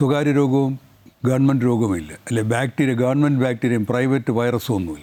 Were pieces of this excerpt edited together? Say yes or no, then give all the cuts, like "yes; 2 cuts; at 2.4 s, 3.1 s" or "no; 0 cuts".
no; 0 cuts